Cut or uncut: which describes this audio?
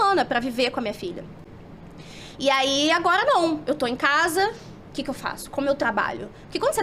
uncut